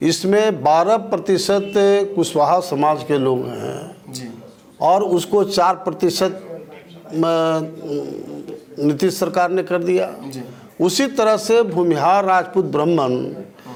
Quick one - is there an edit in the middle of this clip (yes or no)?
no